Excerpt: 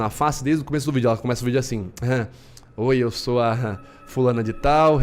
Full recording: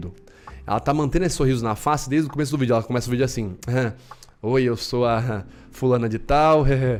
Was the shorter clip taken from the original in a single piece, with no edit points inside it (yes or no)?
yes